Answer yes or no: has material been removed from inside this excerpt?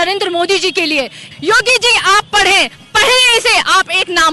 yes